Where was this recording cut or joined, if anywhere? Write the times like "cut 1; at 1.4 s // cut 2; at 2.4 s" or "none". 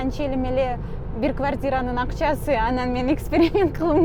none